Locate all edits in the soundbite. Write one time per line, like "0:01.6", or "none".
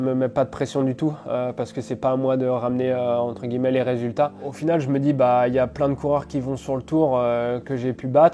0:04.5